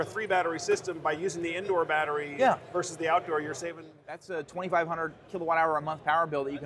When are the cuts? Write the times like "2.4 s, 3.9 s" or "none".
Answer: 4.2 s